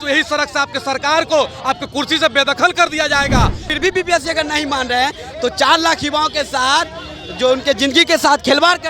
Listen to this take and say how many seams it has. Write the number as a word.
one